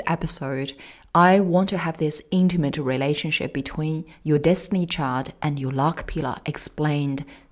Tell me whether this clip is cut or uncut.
uncut